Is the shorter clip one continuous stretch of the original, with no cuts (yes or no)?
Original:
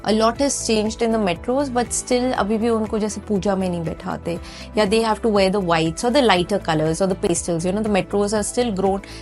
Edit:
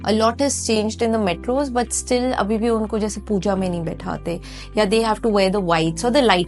yes